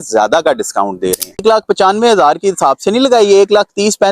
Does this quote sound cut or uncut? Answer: cut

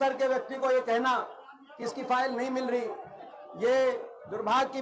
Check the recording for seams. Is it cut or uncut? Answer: uncut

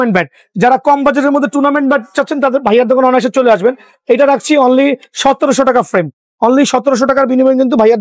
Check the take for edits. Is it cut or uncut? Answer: uncut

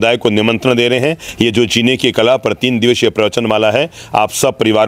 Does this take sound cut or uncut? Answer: uncut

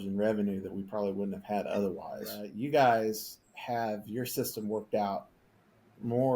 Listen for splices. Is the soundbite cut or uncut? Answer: cut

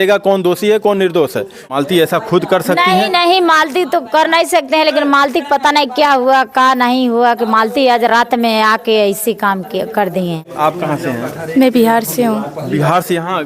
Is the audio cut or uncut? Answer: cut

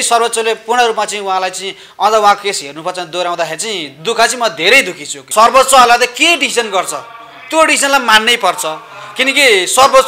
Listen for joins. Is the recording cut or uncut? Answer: cut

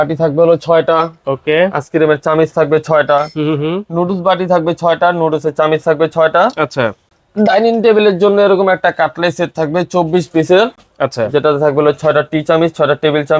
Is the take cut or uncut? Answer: uncut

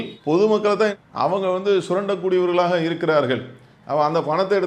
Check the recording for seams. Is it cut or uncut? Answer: uncut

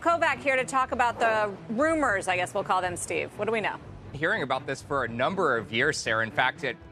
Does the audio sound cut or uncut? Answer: cut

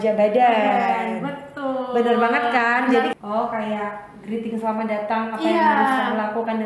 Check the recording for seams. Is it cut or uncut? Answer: cut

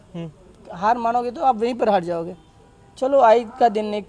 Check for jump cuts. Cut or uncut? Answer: uncut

